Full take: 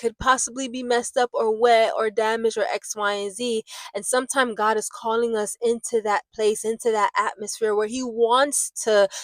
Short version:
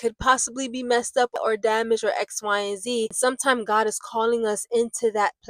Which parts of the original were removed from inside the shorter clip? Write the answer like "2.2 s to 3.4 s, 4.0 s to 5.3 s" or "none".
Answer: 1.3 s to 1.9 s, 3.7 s to 4.0 s